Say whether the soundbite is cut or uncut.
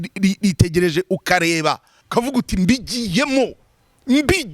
cut